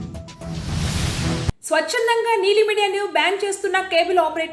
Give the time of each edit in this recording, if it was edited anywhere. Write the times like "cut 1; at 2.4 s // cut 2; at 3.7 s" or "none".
cut 1; at 1.5 s